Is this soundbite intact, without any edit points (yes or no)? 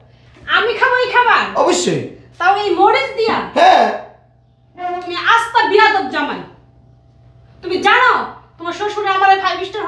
yes